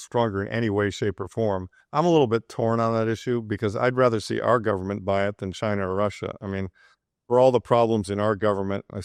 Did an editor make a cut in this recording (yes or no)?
no